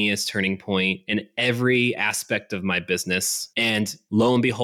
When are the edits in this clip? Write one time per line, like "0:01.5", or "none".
0:01.0
0:03.7